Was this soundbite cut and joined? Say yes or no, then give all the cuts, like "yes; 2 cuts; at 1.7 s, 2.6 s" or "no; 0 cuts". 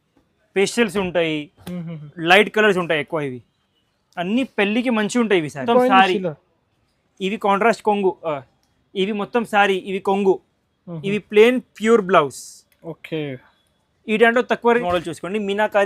yes; 2 cuts; at 5.6 s, 14.8 s